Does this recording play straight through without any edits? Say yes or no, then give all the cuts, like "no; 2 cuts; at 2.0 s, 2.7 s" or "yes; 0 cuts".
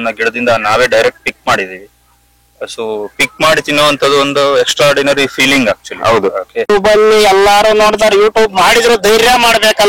no; 1 cut; at 6.7 s